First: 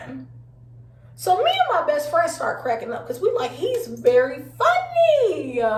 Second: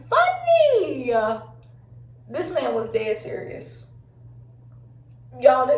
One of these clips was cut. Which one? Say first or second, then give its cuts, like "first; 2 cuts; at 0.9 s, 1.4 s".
second; 1 cut; at 4.0 s